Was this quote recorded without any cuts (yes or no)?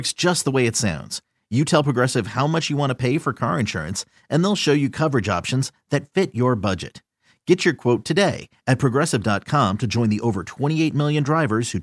yes